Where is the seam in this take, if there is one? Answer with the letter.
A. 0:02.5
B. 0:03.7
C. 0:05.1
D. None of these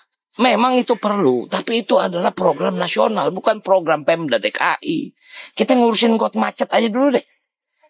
D